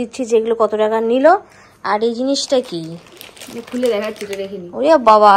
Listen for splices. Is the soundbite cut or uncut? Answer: uncut